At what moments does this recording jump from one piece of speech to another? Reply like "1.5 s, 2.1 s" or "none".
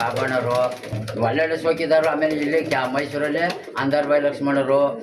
1.0 s

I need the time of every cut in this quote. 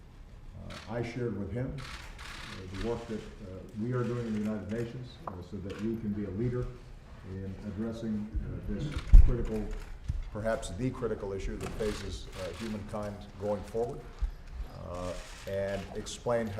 5.1 s

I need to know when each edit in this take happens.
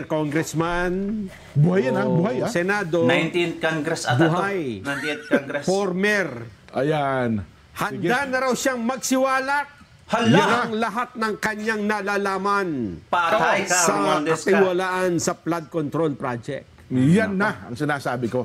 none

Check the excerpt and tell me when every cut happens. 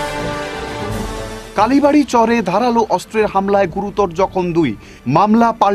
0.9 s

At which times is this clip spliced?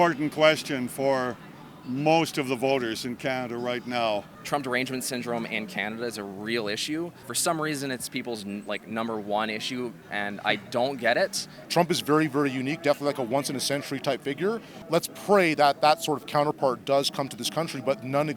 4.3 s, 7.2 s, 10.0 s, 11.5 s, 14.7 s

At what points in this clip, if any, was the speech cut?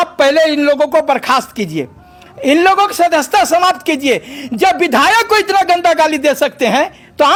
none

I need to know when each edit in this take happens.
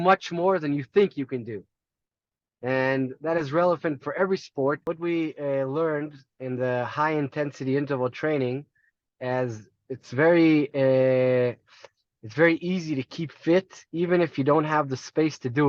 4.8 s

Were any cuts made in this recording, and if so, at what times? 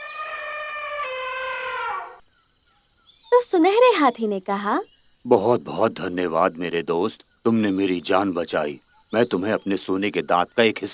1.9 s

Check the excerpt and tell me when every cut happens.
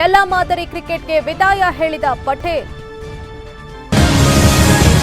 3.9 s

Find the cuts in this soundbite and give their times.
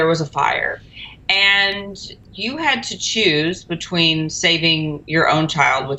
none

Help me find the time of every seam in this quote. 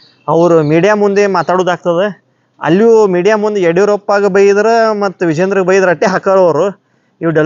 none

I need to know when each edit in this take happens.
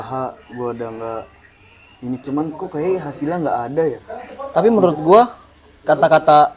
none

